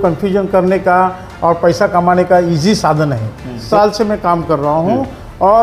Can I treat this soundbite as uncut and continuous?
no; 1 cut; at 3.6 s

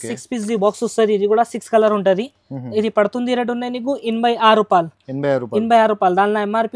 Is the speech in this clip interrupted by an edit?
no; 0 cuts

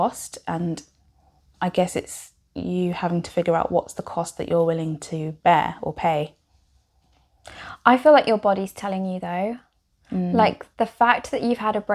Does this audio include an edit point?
no; 0 cuts

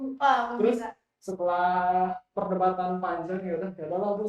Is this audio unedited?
no; 1 cut; at 1.6 s

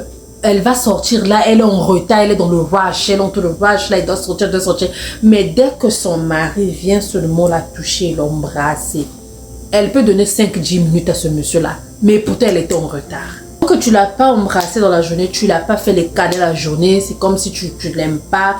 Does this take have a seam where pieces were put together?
yes; 1 cut; at 13.6 s

